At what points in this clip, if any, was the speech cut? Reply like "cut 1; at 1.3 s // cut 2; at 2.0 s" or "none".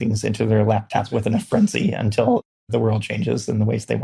none